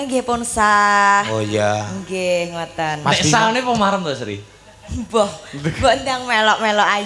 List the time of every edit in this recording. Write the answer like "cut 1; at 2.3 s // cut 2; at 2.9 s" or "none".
none